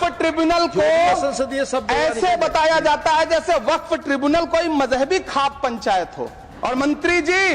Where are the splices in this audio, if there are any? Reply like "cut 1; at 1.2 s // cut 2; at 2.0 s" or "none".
cut 1; at 6.5 s